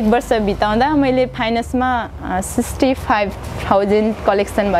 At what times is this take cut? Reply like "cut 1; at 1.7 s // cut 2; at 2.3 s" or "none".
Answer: none